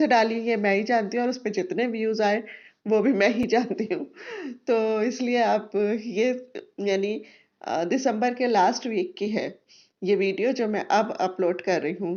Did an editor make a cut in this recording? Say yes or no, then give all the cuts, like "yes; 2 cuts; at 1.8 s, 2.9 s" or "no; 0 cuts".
no; 0 cuts